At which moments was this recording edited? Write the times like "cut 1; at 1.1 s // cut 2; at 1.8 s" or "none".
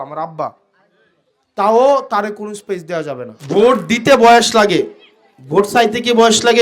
cut 1; at 3.3 s